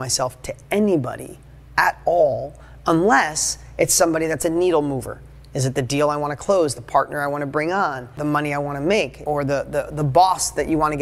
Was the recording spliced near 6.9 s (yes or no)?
no